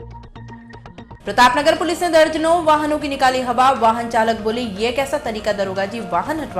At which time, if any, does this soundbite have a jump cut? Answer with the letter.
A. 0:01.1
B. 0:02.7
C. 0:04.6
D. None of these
A